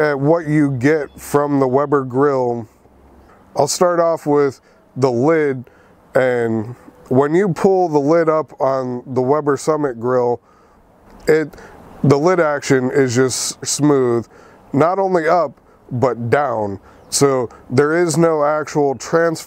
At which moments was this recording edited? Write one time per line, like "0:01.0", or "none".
0:01.1